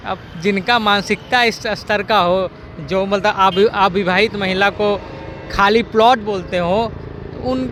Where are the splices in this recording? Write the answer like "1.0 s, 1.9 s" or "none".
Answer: none